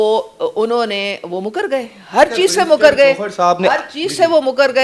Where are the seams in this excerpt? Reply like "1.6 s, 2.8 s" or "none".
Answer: none